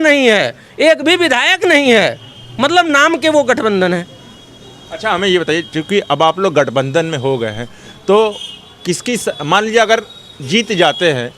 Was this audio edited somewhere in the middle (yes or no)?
no